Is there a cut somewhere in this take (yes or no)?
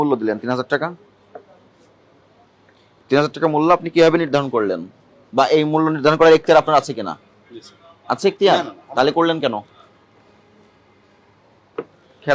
no